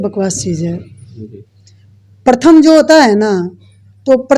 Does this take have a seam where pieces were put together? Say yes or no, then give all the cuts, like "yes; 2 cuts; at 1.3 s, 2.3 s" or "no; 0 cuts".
no; 0 cuts